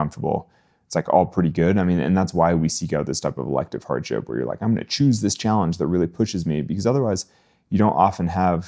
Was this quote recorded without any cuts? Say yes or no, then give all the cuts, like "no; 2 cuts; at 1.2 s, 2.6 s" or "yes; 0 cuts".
yes; 0 cuts